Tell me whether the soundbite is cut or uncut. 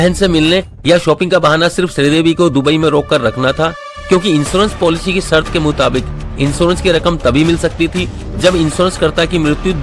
uncut